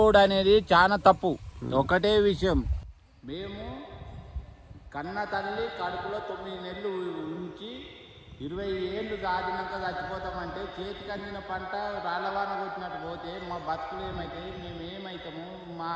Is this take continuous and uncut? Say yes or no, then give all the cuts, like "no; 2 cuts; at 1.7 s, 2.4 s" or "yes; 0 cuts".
yes; 0 cuts